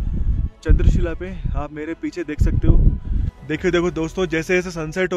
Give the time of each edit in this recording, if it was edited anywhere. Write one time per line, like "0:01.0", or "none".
0:03.3

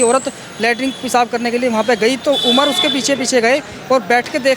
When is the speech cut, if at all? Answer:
none

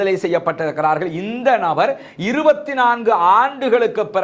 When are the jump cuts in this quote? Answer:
none

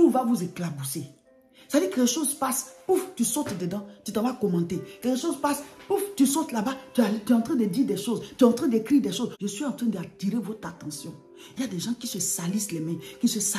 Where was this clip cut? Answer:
0:09.3

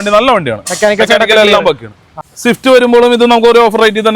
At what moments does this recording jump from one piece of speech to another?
0:02.3

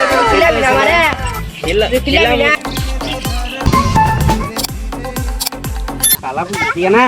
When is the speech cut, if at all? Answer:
0:02.5
0:06.2

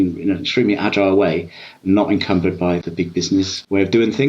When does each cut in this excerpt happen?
0:03.3

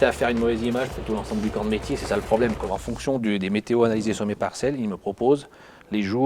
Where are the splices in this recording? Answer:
0:02.7

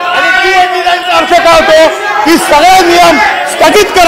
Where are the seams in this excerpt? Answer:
none

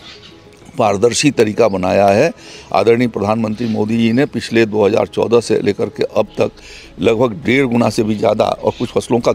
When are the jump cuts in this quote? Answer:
none

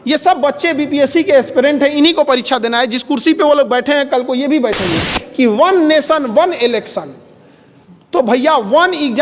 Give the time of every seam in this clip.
0:05.2

